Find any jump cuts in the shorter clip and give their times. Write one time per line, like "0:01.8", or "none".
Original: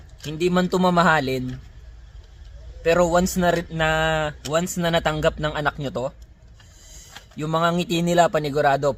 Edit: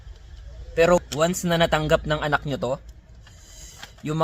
0:01.0

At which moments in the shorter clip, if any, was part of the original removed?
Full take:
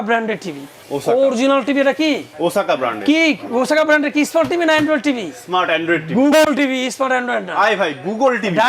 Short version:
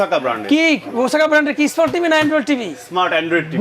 none

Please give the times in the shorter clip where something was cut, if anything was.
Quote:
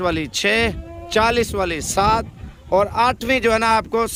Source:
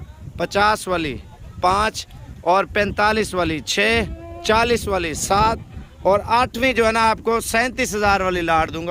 none

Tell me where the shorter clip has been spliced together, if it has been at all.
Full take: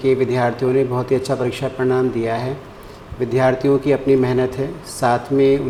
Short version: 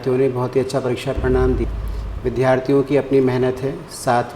0:01.6

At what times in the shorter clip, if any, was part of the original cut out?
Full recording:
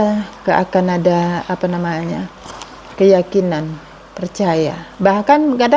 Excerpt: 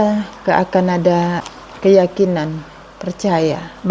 0:01.5

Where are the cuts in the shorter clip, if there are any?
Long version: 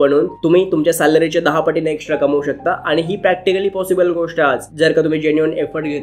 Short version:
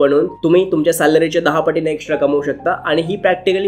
none

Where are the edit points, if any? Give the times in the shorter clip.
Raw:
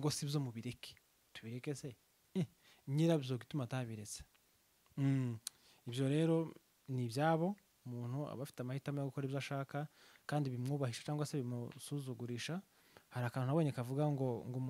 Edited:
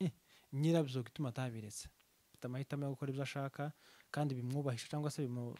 0:02.4

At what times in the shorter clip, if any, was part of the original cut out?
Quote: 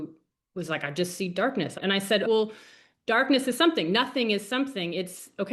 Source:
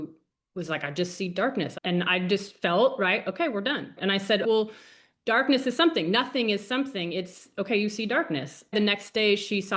0:01.7

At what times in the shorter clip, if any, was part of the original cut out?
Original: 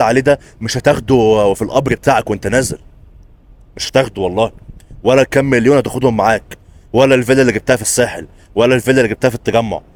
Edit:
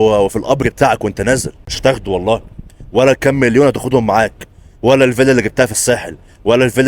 0:01.6

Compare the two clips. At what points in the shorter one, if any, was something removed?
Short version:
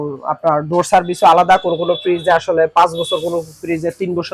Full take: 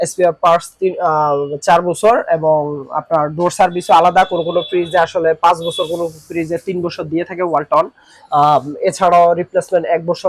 none

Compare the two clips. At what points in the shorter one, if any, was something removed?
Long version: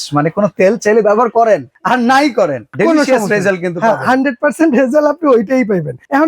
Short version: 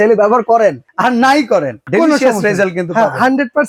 none

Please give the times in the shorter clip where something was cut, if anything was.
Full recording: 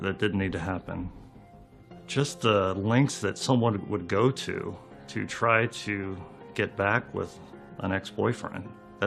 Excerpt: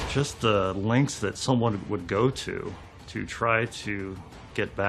none

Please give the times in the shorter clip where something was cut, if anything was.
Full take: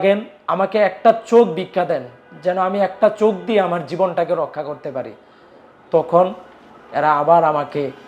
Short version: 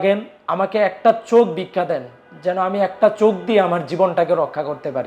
none

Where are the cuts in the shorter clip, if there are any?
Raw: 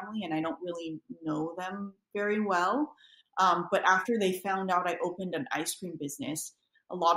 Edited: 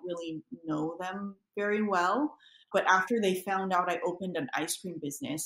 0:02.7

